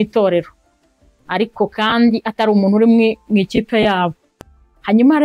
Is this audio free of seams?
yes; 0 cuts

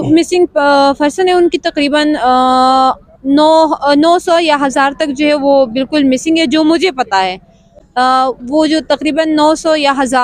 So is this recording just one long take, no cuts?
yes; 0 cuts

